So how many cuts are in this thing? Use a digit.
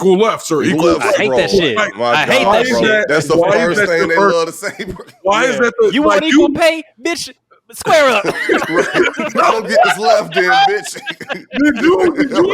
1